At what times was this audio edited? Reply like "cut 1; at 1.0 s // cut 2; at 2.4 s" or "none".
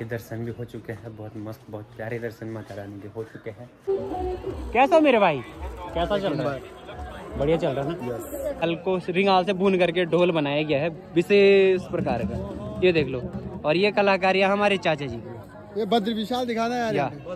cut 1; at 3.9 s // cut 2; at 8.6 s